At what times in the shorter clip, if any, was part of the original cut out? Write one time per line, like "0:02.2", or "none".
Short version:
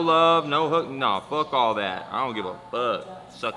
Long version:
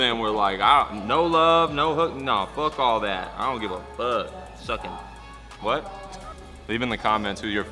none